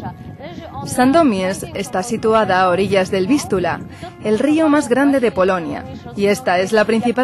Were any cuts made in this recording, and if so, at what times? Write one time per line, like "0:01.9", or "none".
0:01.0